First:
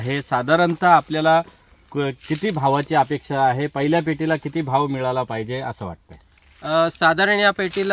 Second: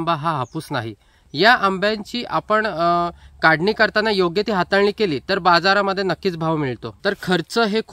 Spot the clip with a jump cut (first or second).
second